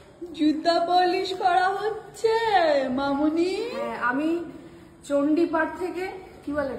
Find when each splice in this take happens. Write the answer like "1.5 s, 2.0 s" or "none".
none